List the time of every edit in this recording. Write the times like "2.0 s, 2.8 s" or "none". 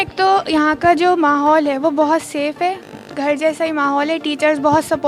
none